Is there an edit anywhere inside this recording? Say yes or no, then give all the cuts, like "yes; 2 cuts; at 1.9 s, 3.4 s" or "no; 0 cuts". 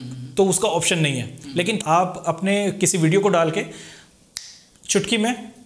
yes; 1 cut; at 1.8 s